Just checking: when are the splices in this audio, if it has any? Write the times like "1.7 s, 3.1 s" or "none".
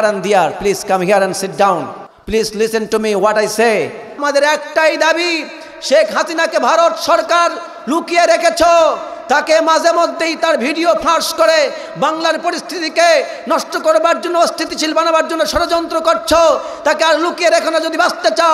2.1 s, 4.2 s